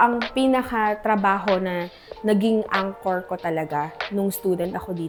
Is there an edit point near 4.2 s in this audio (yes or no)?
no